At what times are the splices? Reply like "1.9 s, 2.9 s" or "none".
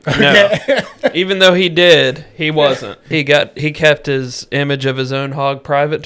3.0 s